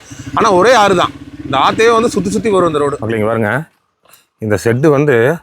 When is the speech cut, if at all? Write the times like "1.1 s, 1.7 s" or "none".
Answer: 3.0 s